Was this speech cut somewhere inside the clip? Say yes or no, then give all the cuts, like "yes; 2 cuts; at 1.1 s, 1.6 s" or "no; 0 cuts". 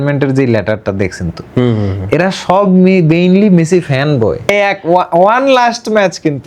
yes; 1 cut; at 4.5 s